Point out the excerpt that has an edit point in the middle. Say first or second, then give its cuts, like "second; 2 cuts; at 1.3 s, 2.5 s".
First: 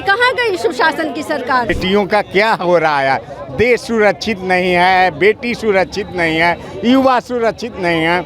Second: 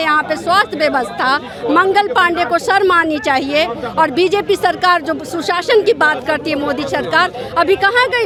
first; 1 cut; at 1.7 s